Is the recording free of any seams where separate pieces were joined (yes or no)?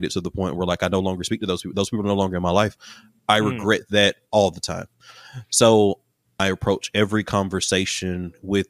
no